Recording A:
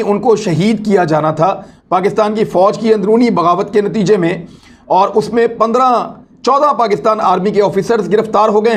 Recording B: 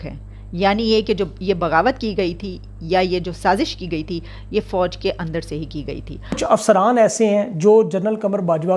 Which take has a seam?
B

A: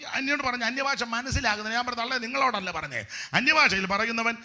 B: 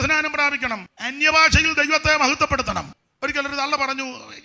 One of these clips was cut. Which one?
B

